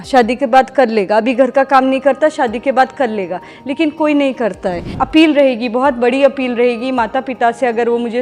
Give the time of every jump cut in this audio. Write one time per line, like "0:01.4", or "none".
0:04.9